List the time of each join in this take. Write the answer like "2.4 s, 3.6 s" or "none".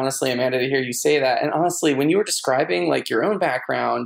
none